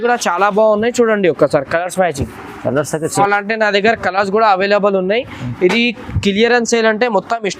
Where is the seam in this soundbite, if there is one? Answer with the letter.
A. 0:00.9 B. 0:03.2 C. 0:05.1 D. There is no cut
B